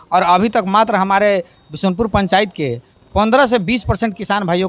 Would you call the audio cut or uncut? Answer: uncut